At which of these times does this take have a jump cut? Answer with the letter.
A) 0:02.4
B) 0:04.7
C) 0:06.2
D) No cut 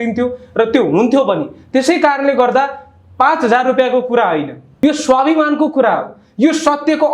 B